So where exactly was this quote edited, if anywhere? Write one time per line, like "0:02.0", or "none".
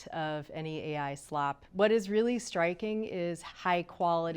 0:01.6
0:03.4